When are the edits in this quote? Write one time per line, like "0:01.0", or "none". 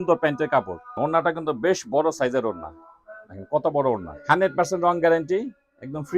0:00.9
0:04.1